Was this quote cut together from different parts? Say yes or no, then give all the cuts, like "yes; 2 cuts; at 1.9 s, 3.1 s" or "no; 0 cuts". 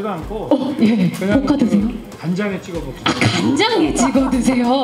yes; 1 cut; at 2.1 s